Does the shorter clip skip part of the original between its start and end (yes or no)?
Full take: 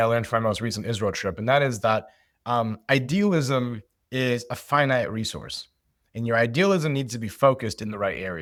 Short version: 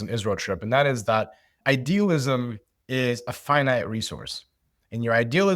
yes